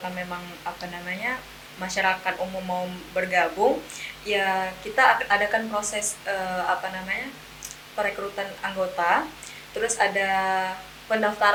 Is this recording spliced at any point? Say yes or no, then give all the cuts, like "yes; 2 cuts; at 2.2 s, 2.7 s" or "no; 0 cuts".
no; 0 cuts